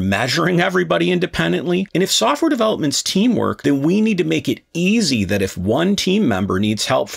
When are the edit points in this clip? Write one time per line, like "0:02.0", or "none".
0:01.9
0:03.6